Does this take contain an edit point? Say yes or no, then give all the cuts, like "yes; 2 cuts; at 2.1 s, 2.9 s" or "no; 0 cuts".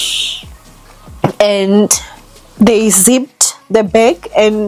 no; 0 cuts